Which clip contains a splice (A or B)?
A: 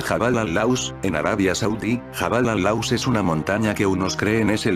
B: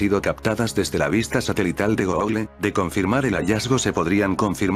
A